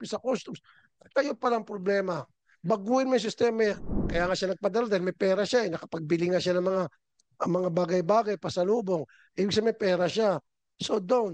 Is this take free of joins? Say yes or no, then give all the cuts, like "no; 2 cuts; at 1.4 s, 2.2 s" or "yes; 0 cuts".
no; 1 cut; at 4.0 s